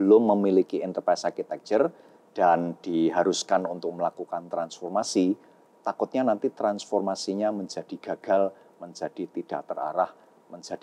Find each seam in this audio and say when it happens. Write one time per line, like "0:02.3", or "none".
none